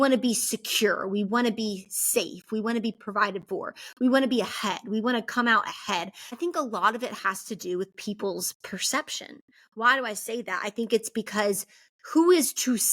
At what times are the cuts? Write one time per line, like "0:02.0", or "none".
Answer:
0:06.4